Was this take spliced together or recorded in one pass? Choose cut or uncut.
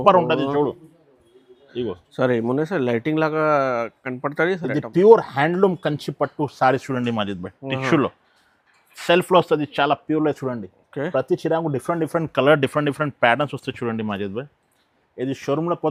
uncut